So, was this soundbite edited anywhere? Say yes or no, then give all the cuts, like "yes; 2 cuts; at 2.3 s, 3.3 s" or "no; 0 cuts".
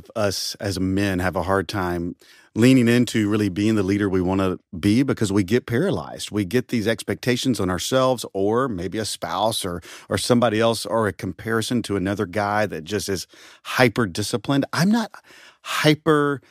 no; 0 cuts